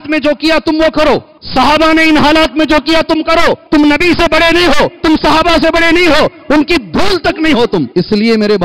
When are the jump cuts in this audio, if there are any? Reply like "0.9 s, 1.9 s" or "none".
1.4 s, 3.6 s, 4.9 s, 7.9 s